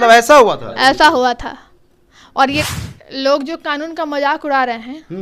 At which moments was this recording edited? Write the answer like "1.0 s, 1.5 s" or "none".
2.6 s